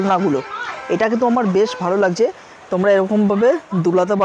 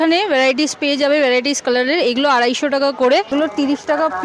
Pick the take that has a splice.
second; 1 cut; at 3.3 s

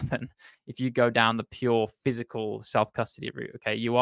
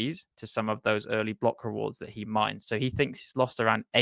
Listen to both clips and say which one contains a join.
second; 1 cut; at 2.6 s

